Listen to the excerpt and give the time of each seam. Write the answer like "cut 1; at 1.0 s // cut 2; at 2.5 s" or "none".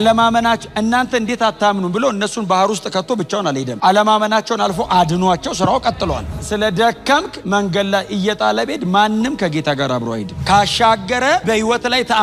cut 1; at 6.3 s // cut 2; at 10.3 s